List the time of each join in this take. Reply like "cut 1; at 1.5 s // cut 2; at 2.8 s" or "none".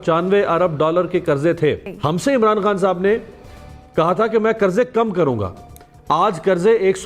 cut 1; at 1.9 s